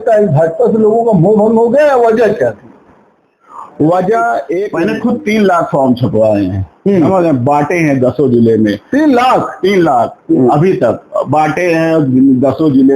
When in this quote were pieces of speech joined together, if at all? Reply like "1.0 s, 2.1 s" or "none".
4.7 s